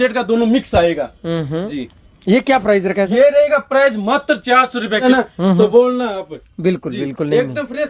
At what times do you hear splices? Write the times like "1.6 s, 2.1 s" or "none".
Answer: 5.0 s

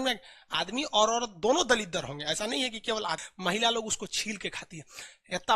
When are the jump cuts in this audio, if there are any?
3.2 s

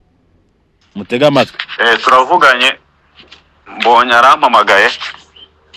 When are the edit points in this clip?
none

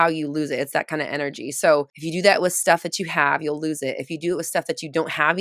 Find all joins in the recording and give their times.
2.0 s

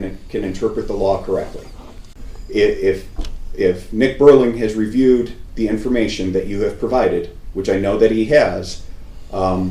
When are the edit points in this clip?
2.0 s

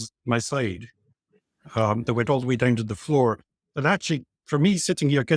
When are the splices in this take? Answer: none

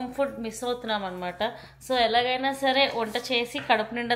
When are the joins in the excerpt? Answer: none

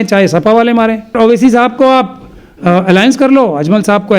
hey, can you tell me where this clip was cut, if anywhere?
1.2 s

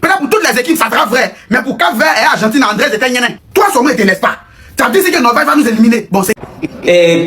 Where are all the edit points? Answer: 6.3 s

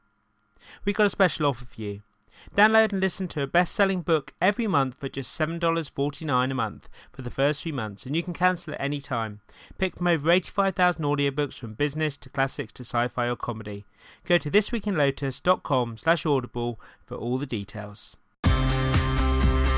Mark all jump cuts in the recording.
18.3 s

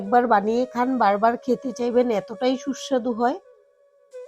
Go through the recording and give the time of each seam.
3.4 s

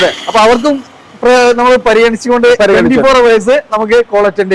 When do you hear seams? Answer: none

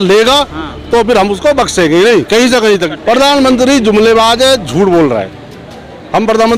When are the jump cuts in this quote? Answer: 2.9 s

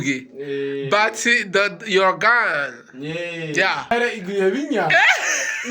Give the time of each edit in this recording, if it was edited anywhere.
3.9 s

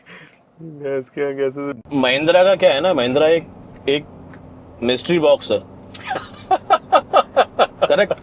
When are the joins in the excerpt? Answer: 1.9 s

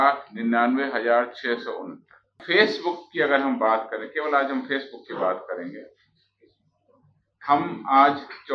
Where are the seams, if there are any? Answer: 2.4 s

